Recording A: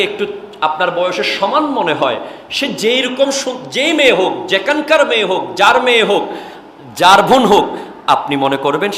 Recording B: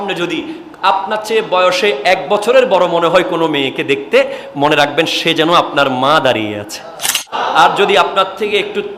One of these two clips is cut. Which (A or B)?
B